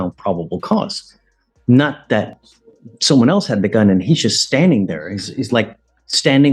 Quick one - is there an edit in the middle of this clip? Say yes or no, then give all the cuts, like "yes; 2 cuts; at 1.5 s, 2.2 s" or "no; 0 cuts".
no; 0 cuts